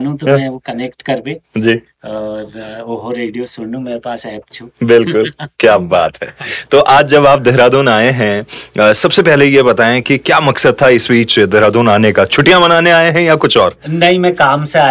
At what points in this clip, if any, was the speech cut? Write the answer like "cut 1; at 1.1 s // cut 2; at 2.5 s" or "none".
none

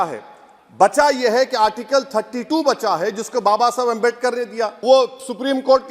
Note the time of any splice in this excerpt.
cut 1; at 4.8 s

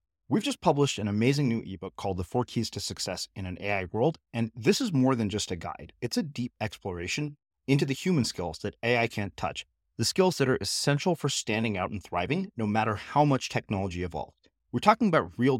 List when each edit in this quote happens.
none

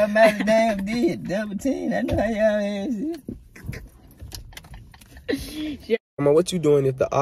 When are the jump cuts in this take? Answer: cut 1; at 6.1 s

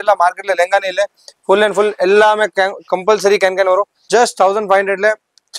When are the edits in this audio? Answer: cut 1; at 4.0 s

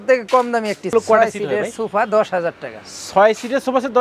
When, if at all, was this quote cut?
cut 1; at 0.9 s

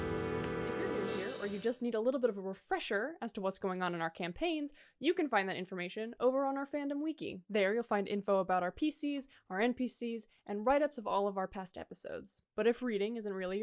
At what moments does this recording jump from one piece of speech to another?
cut 1; at 1.3 s

